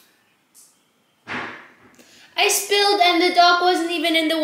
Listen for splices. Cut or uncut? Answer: uncut